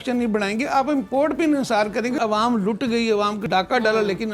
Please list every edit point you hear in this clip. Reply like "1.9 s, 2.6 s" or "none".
2.2 s, 3.4 s